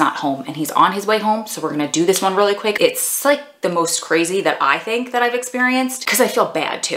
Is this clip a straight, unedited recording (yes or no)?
no